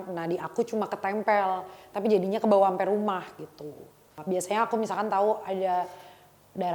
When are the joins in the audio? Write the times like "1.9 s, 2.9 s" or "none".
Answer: 4.1 s